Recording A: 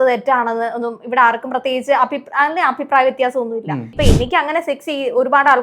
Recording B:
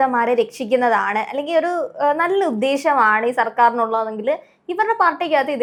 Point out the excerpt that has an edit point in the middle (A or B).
A